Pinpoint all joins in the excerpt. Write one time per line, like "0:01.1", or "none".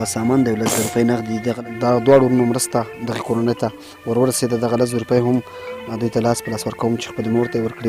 0:01.6